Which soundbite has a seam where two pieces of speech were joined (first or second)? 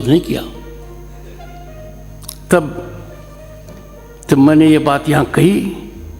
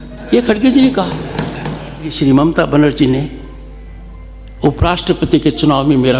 second